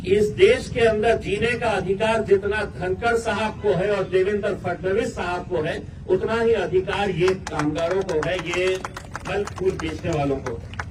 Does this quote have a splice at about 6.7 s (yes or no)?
no